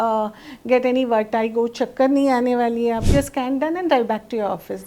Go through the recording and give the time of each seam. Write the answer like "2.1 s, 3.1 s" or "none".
3.1 s